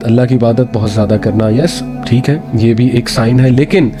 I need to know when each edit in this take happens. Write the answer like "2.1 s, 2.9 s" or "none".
none